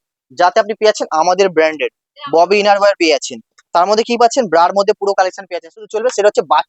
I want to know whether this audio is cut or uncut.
cut